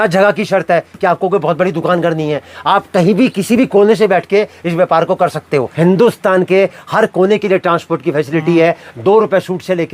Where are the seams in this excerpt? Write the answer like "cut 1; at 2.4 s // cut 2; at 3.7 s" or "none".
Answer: cut 1; at 5.7 s

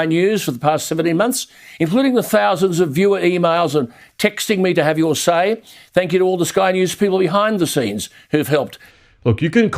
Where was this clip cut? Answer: cut 1; at 8.8 s

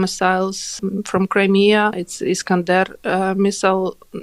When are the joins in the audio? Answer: cut 1; at 0.8 s // cut 2; at 2.1 s

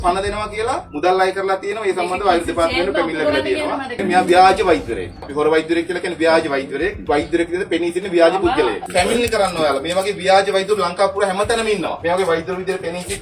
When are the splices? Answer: cut 1; at 3.9 s // cut 2; at 8.8 s

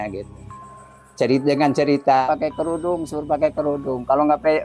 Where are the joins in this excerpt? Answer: cut 1; at 2.2 s

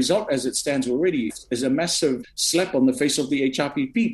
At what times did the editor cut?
cut 1; at 1.3 s // cut 2; at 2.2 s

